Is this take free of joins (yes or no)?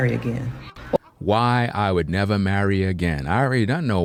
yes